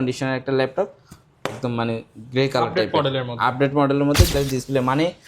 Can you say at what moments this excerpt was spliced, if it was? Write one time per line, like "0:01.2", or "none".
0:04.3